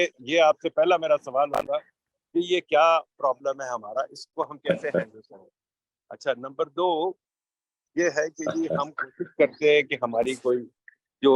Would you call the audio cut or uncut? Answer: uncut